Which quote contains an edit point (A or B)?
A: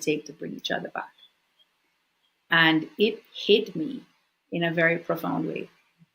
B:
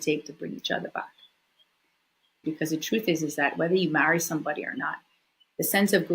B